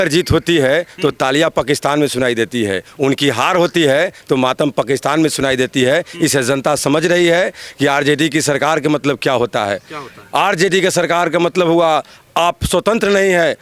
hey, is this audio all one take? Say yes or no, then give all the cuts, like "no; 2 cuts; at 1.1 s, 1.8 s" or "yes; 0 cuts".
yes; 0 cuts